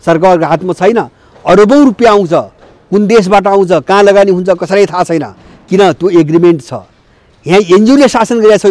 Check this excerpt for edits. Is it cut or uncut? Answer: uncut